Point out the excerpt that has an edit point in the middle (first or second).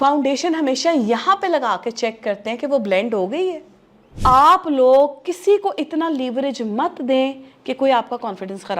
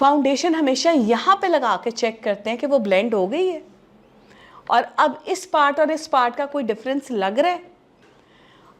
first